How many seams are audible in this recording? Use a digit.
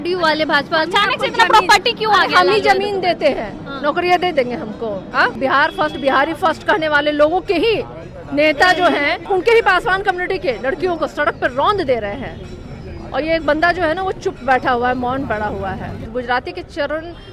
3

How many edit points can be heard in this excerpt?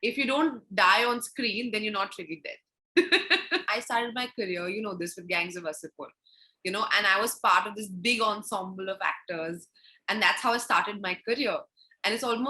1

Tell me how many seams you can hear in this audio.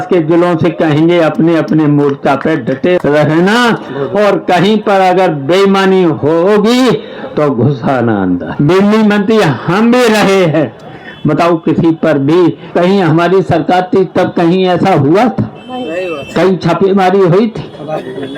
4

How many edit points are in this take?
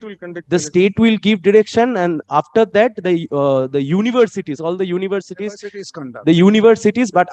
0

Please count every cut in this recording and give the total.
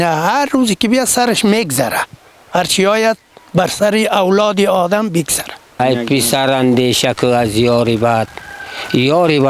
1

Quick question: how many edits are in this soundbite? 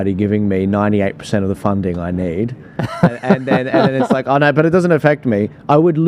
0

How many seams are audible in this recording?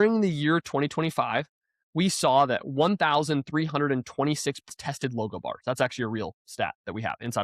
1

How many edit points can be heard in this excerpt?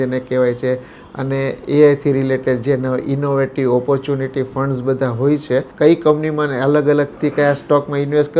1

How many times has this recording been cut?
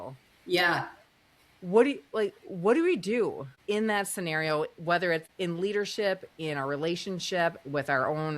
1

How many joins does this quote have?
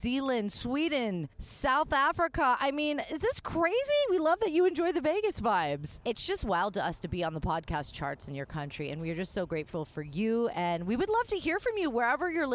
1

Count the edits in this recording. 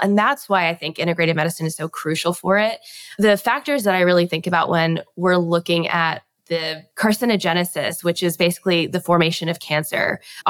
1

